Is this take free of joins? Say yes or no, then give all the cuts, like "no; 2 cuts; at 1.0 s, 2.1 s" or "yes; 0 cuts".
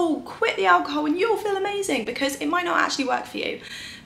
yes; 0 cuts